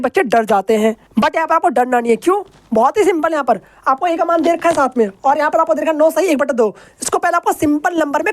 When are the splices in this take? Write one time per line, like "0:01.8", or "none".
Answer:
none